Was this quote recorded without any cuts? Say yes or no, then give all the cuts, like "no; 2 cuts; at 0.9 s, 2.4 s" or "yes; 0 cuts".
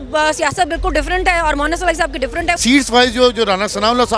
no; 1 cut; at 2.6 s